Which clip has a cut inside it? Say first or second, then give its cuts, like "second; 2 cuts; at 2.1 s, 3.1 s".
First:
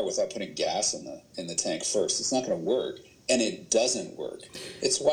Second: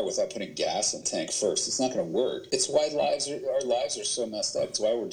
second; 2 cuts; at 1.0 s, 2.4 s